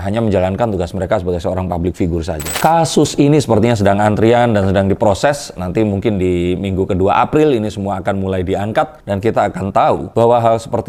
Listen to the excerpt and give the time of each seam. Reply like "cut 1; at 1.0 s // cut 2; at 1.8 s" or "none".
none